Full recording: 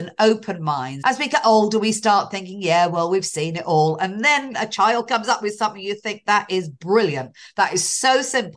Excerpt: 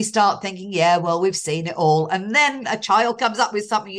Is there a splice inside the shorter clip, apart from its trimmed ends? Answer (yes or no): no